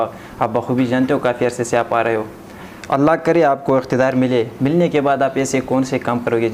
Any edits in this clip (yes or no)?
no